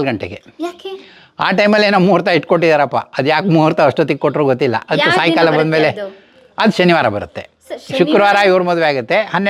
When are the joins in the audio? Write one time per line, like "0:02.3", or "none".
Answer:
none